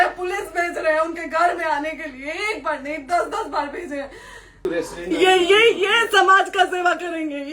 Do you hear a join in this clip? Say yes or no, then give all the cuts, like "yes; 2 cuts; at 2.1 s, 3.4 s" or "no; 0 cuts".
yes; 1 cut; at 4.6 s